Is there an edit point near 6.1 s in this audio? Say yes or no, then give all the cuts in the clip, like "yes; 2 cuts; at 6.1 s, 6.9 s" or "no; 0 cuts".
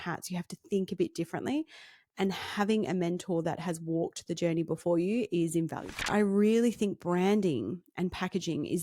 yes; 1 cut; at 6.1 s